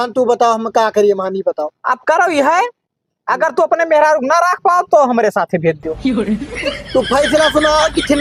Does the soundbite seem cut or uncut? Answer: uncut